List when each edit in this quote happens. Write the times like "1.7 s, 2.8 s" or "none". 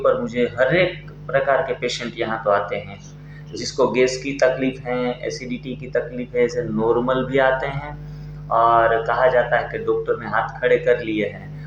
none